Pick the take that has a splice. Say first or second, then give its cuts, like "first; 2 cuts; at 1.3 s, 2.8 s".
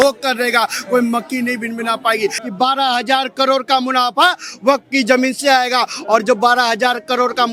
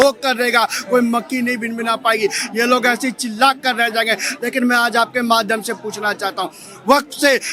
first; 1 cut; at 2.4 s